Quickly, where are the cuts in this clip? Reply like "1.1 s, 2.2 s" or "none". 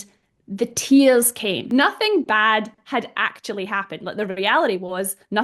1.6 s